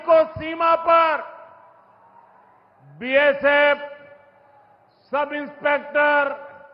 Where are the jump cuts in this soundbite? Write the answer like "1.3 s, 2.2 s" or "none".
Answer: none